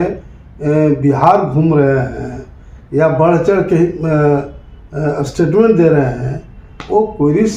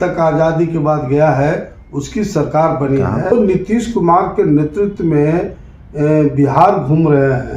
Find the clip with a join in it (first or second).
second